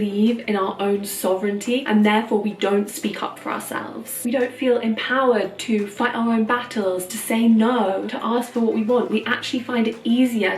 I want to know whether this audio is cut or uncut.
uncut